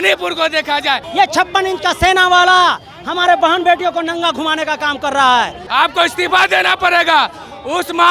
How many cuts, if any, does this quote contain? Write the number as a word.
two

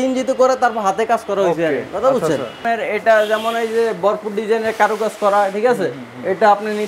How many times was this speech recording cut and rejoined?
one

